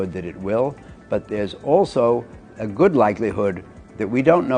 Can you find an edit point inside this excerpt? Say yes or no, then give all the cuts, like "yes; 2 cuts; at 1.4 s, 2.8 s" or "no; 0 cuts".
no; 0 cuts